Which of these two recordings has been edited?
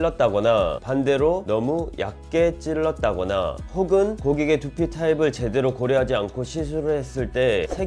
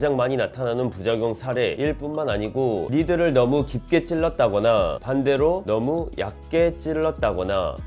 second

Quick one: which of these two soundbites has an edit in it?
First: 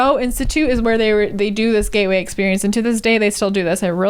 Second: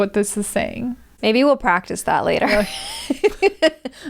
second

